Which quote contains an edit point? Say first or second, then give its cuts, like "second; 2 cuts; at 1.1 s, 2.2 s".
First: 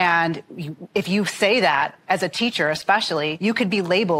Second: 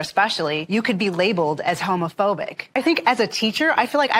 second; 1 cut; at 2.7 s